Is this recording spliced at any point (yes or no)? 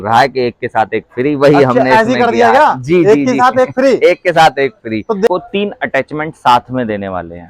yes